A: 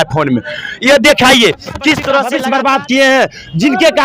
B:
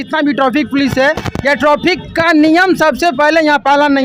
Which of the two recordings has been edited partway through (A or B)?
A